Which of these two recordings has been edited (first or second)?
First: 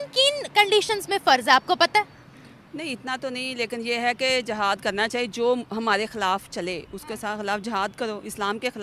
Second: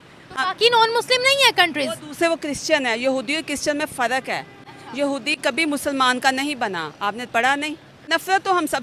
second